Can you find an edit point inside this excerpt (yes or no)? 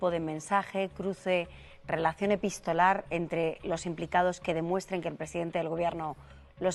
no